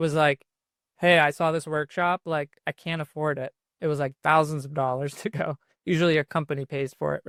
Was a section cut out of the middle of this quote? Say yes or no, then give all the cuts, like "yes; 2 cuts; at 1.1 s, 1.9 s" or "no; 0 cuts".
no; 0 cuts